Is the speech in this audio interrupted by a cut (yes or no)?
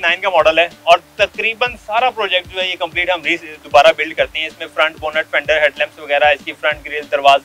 no